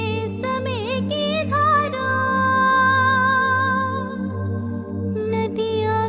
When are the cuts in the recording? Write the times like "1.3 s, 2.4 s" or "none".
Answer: none